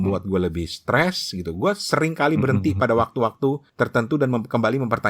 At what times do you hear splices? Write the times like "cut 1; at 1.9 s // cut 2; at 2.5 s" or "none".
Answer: cut 1; at 3.7 s